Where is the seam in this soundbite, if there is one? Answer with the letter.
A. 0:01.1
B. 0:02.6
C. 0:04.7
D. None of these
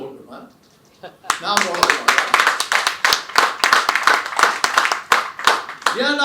D